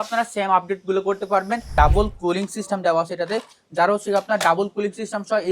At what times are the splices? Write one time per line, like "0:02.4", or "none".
0:01.7